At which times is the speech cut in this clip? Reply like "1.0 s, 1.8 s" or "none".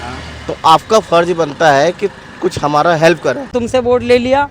3.5 s